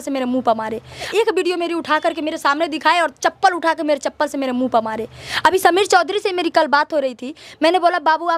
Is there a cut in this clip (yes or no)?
no